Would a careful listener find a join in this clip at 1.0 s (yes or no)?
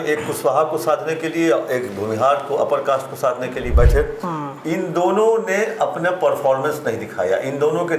no